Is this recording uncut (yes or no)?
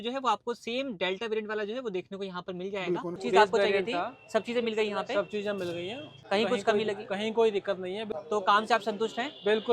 no